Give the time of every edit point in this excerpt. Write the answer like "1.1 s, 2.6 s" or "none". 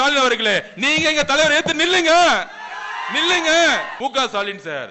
3.9 s